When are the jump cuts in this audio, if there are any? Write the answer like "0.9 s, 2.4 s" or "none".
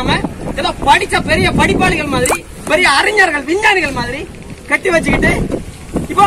none